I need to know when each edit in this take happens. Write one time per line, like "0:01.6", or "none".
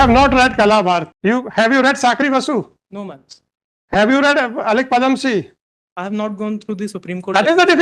0:01.1